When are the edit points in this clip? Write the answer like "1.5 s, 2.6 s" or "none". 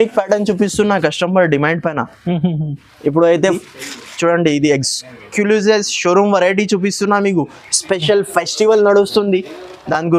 3.6 s